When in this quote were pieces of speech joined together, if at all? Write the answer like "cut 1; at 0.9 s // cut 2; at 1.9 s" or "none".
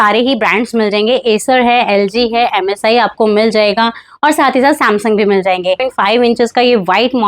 cut 1; at 5.9 s